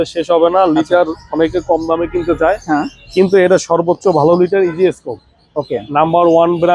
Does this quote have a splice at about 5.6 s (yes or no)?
no